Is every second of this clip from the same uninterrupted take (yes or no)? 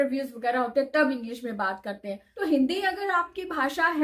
no